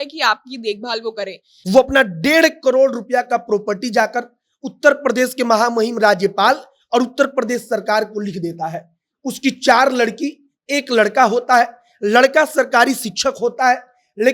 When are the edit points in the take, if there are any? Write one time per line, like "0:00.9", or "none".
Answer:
0:01.5